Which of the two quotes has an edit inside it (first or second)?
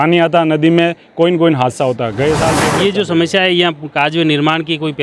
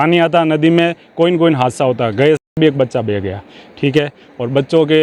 first